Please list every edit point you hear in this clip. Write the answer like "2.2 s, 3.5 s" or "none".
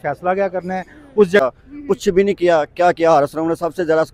1.4 s